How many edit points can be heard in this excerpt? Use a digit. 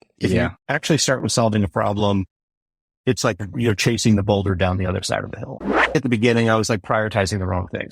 1